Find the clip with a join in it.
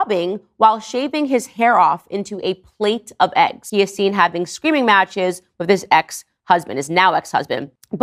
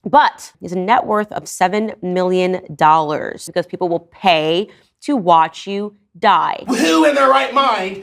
second; 2 cuts; at 3.5 s, 6.6 s

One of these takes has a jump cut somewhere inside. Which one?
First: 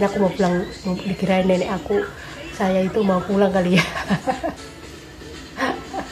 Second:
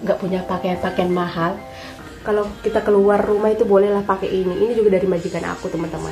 second; 1 cut; at 2.0 s

